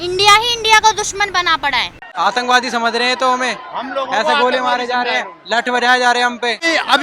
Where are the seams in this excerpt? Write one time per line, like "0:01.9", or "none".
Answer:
0:02.1